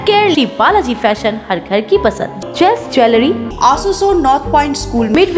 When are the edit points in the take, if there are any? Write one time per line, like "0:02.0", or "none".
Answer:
0:03.5